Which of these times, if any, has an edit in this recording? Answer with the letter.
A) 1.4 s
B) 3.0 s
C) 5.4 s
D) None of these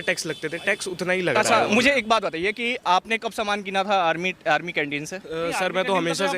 A